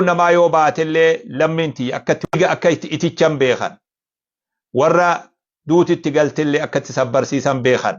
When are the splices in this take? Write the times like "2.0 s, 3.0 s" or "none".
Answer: 2.2 s